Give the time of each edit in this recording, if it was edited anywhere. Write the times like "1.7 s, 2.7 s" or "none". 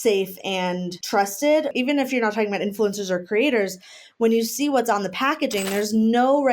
1.0 s, 1.7 s